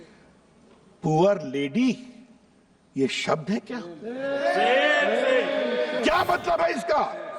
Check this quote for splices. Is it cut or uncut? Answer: cut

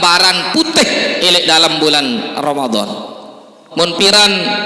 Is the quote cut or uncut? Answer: cut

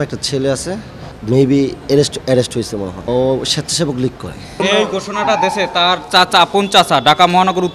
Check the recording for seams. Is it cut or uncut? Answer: cut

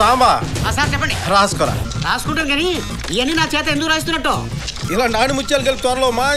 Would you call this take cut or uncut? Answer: uncut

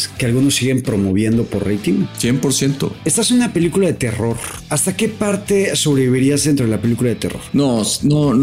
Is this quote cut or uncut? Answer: cut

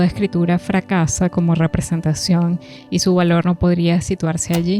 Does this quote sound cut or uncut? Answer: uncut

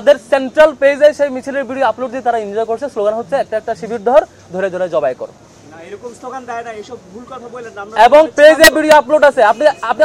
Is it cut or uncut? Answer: uncut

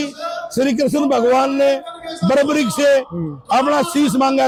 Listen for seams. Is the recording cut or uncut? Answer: uncut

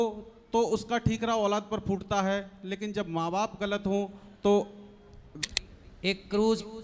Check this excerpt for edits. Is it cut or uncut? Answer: cut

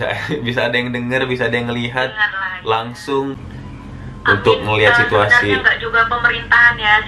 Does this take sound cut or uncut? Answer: cut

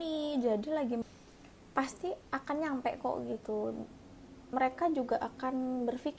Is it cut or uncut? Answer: cut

